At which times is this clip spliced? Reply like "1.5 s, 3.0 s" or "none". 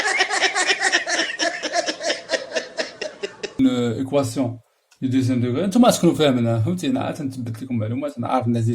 3.6 s